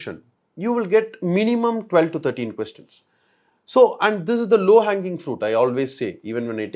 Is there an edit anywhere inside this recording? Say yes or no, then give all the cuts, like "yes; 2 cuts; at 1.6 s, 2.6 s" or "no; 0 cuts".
no; 0 cuts